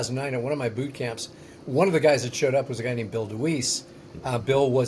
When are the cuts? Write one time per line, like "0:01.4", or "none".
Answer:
none